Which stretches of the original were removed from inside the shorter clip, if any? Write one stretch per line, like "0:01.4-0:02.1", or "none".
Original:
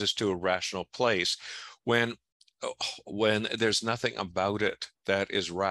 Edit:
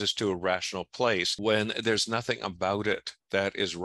0:01.3-0:03.1